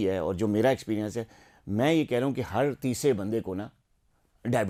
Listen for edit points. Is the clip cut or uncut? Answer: uncut